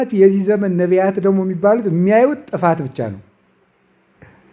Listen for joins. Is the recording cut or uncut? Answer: uncut